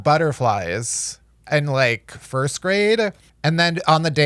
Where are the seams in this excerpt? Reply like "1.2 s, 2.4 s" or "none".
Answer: 3.3 s